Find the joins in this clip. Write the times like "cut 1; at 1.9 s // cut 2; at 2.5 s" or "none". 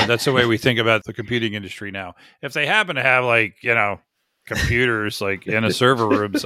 cut 1; at 1.0 s